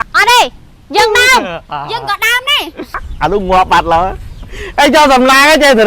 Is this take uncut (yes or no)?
no